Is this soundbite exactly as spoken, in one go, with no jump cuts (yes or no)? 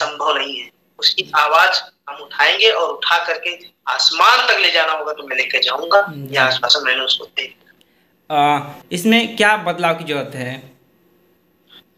yes